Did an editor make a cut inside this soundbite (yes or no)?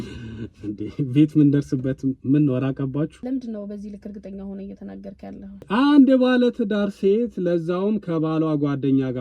yes